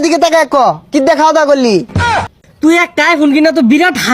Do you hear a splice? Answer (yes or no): yes